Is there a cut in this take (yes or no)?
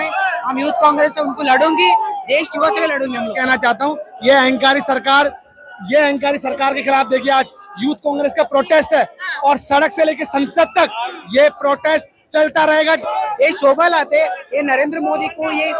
yes